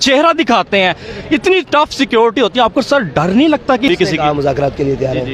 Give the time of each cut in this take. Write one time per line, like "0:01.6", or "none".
0:03.9